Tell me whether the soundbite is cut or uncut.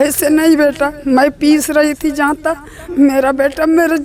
uncut